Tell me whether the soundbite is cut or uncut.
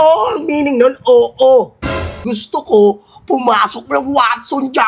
cut